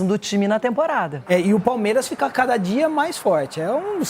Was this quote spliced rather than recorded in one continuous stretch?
yes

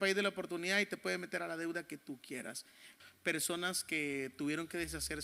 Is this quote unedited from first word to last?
no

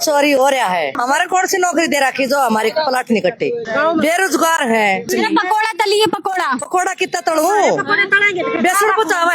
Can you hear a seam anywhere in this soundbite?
yes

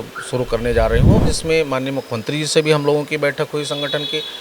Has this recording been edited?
yes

